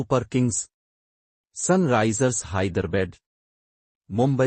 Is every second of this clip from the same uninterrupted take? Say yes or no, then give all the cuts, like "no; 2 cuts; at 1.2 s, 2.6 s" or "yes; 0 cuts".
yes; 0 cuts